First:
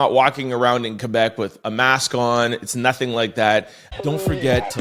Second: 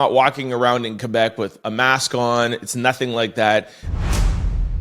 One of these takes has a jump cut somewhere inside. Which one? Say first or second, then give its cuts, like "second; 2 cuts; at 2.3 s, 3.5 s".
second; 1 cut; at 3.8 s